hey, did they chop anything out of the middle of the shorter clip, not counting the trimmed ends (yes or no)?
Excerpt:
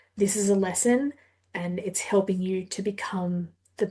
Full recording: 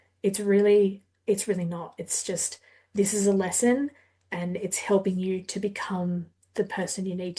no